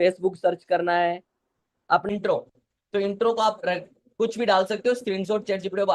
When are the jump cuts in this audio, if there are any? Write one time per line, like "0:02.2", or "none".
0:02.0